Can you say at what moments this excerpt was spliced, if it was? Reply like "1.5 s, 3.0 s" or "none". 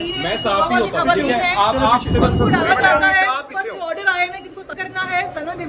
4.7 s